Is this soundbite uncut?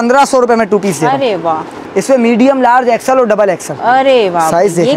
no; 1 cut; at 1.8 s

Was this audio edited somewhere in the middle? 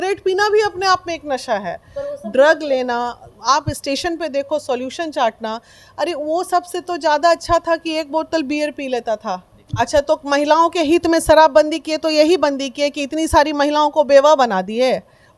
yes; 1 cut; at 9.6 s

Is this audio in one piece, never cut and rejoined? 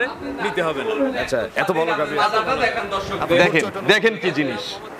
no; 1 cut; at 2.2 s

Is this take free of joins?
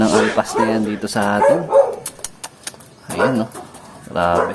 yes; 0 cuts

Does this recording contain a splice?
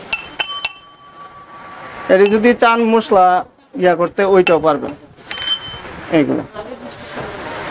no; 0 cuts

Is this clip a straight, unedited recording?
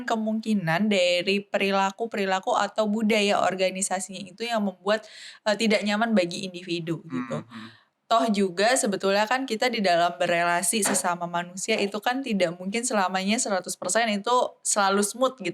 yes; 0 cuts

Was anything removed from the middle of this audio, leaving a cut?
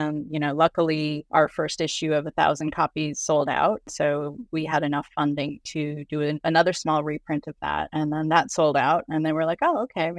yes; 4 cuts; at 1.2 s, 3.9 s, 6.4 s, 7.9 s

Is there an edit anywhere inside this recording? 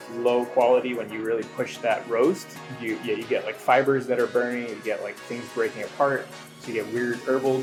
no; 0 cuts

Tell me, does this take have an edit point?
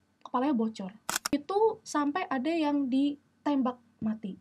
yes; 1 cut; at 1.3 s

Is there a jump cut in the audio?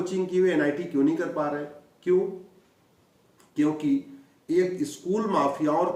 no; 0 cuts

